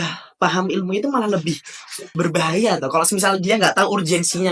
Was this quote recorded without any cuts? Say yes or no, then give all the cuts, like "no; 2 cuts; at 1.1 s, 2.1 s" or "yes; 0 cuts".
yes; 0 cuts